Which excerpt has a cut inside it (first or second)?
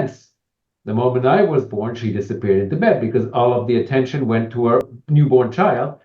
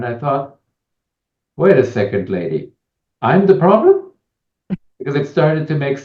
first